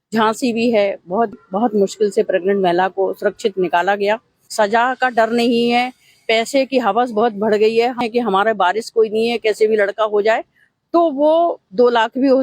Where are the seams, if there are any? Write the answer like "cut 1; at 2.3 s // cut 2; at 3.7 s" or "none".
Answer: cut 1; at 1.3 s // cut 2; at 4.4 s // cut 3; at 8.0 s